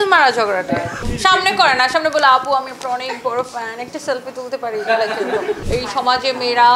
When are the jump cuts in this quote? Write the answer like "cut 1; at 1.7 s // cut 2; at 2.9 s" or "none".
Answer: cut 1; at 1.0 s // cut 2; at 5.6 s